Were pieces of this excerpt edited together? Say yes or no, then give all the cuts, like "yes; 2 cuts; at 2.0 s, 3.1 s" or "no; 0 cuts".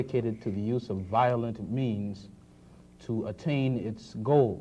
yes; 1 cut; at 2.5 s